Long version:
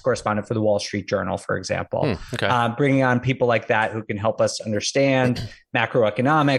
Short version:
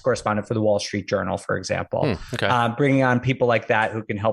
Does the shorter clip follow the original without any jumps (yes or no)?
yes